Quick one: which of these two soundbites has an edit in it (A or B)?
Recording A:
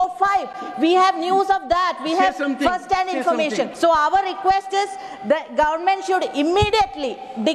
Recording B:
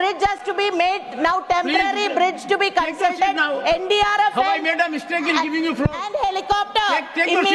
A